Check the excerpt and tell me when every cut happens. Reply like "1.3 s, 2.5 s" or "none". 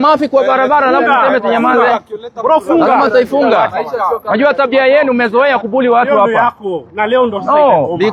none